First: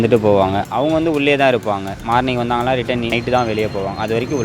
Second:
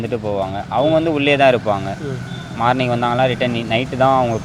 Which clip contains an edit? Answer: first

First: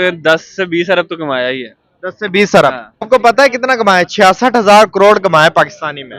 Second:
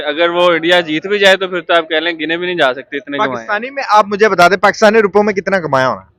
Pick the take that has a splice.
first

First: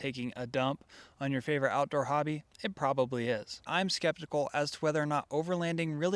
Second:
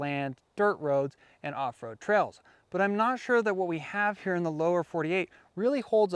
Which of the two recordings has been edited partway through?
first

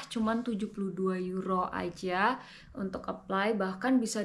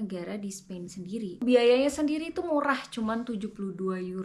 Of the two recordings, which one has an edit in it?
second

